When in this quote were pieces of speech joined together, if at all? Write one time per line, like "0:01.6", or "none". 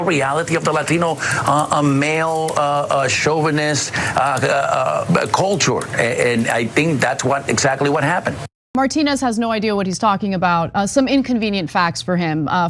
0:08.7